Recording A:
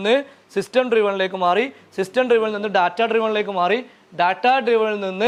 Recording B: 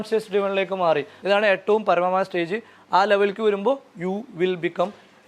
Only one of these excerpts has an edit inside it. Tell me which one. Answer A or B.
B